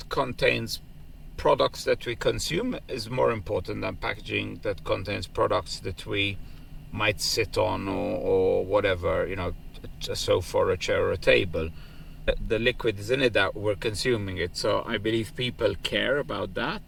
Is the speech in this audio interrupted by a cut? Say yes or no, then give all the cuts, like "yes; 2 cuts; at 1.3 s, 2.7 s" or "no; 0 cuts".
no; 0 cuts